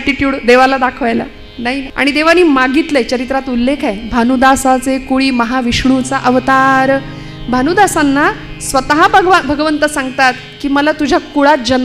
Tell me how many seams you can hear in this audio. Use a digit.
1